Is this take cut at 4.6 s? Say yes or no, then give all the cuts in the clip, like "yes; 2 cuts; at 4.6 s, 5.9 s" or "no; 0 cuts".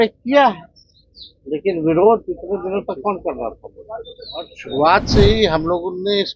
yes; 1 cut; at 4.6 s